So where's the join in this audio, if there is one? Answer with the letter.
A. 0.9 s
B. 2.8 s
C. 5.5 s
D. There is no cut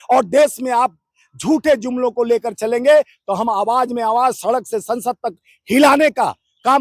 D